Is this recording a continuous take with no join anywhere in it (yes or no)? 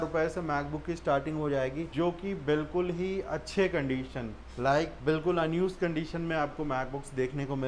yes